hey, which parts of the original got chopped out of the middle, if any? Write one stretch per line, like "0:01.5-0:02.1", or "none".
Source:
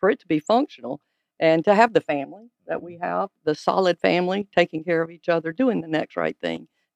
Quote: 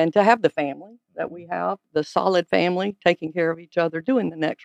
none